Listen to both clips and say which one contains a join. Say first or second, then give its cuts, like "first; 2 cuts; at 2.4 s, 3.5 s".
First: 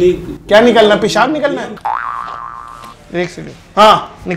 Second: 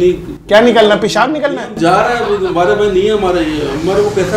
first; 1 cut; at 1.7 s